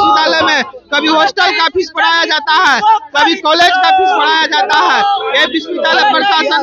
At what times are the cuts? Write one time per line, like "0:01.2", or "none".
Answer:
none